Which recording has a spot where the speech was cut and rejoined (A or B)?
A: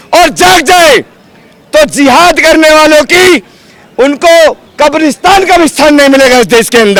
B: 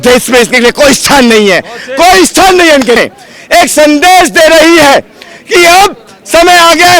B